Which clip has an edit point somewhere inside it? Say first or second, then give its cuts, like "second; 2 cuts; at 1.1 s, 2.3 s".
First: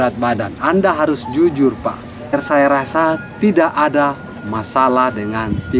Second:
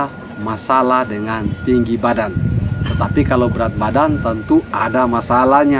first; 1 cut; at 2.3 s